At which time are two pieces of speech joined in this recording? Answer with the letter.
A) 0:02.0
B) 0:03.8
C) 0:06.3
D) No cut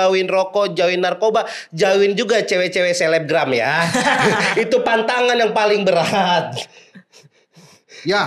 D